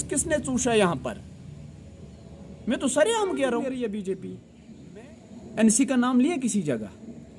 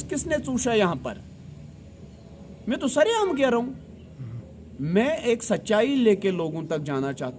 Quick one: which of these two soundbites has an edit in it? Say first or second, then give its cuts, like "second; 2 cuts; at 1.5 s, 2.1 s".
first; 1 cut; at 3.6 s